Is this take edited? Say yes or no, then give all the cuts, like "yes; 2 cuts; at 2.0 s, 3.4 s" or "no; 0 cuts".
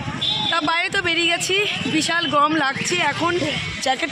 no; 0 cuts